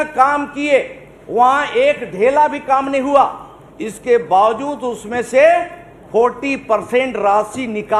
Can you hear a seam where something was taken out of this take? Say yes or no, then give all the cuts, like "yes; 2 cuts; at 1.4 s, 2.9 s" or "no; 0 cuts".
no; 0 cuts